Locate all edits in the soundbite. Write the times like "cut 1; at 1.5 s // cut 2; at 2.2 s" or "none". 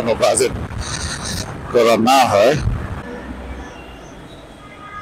cut 1; at 3.0 s